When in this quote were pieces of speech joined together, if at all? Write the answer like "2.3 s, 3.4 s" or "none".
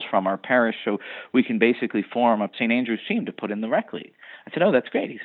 2.5 s